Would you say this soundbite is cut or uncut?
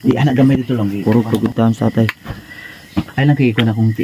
cut